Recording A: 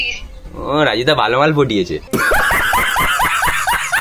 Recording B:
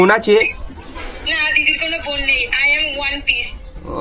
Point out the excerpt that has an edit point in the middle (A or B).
A